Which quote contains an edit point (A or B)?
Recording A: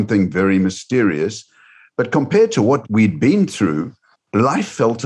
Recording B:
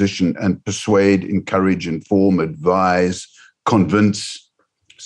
A